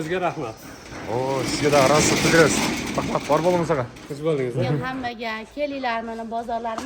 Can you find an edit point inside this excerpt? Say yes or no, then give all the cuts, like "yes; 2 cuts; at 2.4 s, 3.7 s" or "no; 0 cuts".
yes; 1 cut; at 4.9 s